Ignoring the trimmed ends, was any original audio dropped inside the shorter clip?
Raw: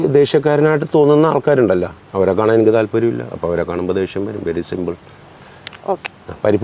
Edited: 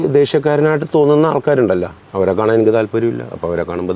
no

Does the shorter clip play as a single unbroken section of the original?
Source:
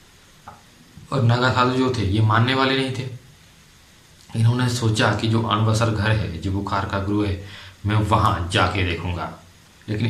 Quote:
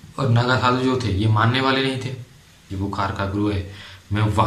no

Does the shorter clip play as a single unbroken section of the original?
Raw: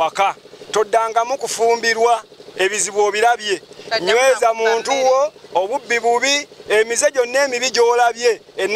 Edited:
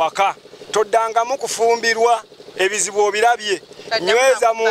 yes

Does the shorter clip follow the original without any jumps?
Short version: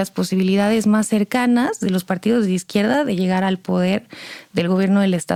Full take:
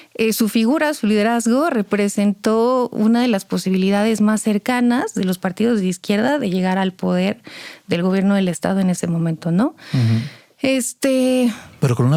yes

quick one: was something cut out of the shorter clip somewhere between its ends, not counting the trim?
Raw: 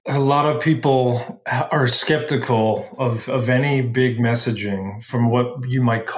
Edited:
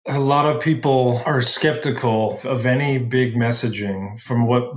yes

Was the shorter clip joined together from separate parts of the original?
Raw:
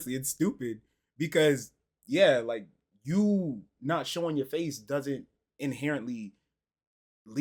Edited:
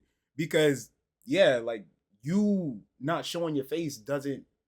no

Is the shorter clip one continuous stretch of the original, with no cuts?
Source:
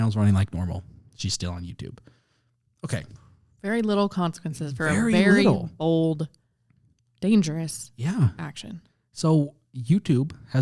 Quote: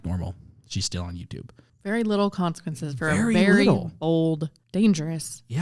no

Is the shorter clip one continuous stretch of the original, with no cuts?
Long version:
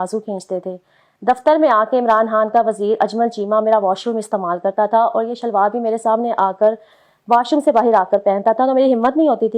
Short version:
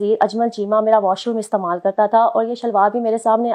yes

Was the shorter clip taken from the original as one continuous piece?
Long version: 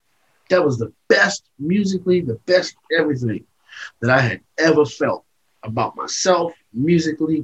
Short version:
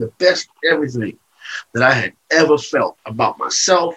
no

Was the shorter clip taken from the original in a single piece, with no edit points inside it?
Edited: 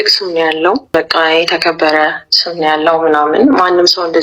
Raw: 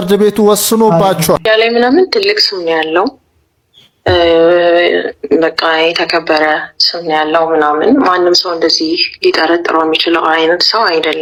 no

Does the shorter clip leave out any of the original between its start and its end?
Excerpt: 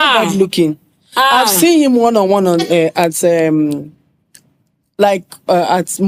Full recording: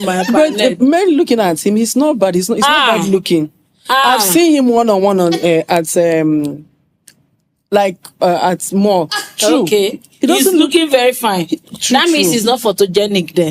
no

